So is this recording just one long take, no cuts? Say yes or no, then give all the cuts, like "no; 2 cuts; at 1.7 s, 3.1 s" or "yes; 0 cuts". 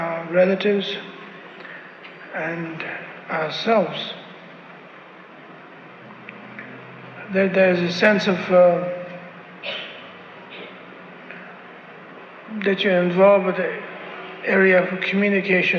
yes; 0 cuts